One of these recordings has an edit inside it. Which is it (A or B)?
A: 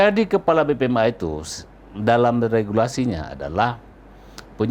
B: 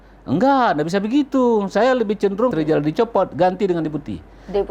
B